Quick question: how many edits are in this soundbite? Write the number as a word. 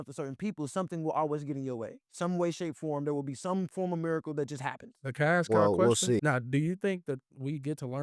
two